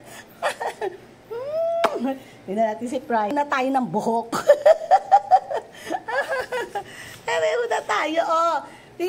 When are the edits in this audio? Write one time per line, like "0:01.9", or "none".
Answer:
0:03.3